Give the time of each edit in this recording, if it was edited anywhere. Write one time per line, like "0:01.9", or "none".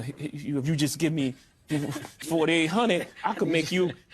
0:02.1